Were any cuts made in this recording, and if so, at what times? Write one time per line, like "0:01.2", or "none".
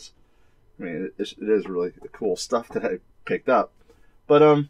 0:03.7